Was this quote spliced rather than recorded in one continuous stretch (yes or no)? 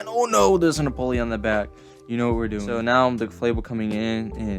yes